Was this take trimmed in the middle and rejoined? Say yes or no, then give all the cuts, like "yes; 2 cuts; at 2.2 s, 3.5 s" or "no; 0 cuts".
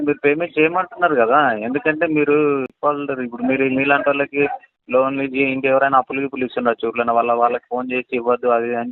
yes; 1 cut; at 2.7 s